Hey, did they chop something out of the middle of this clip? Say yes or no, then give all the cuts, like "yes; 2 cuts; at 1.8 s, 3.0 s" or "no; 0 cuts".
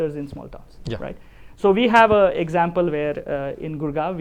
no; 0 cuts